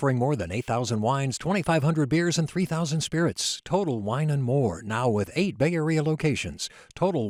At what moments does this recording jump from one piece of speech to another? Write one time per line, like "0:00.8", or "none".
none